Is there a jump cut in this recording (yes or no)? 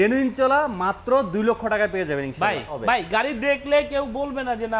yes